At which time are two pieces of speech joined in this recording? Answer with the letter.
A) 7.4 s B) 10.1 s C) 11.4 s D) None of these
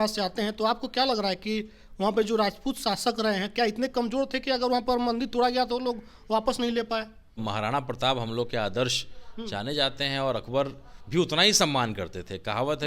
A